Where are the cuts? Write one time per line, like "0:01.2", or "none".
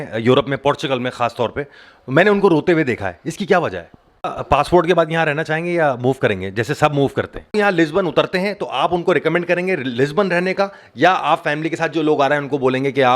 0:04.4
0:07.6